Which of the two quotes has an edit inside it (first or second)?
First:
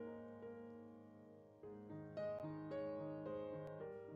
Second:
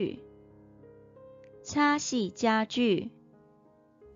second